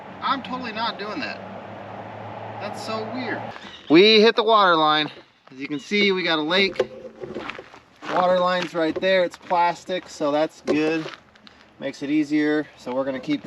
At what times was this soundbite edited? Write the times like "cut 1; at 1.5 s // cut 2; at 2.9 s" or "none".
cut 1; at 3.6 s